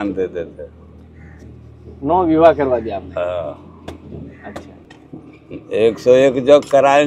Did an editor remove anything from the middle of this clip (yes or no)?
yes